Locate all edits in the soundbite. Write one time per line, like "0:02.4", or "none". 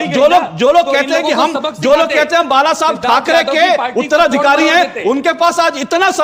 none